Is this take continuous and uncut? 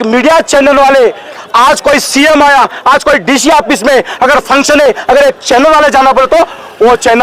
no; 1 cut; at 1.4 s

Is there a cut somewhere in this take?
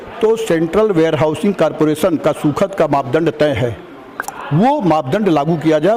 no; 0 cuts

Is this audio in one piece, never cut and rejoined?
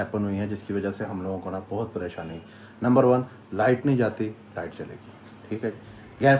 yes; 0 cuts

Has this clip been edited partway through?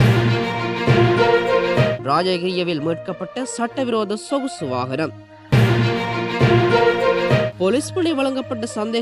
no; 0 cuts

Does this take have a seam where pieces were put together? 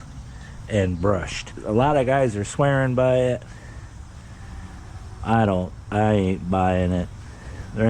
yes; 1 cut; at 1.5 s

